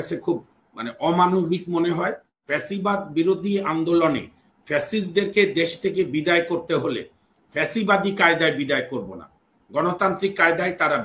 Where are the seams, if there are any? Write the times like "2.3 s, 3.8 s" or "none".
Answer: 2.3 s

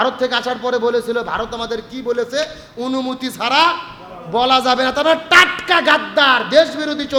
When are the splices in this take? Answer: none

